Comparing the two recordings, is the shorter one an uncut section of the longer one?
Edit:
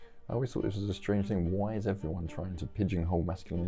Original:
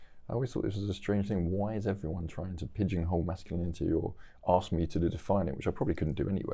yes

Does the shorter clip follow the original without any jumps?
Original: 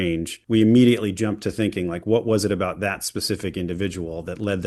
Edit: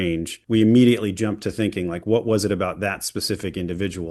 yes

